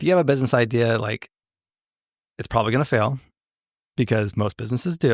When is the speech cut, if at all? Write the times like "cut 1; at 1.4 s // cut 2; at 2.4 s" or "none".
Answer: none